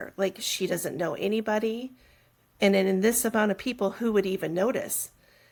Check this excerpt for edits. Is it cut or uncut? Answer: uncut